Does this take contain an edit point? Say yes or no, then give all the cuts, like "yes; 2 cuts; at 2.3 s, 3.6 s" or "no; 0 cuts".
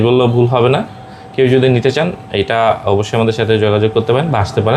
no; 0 cuts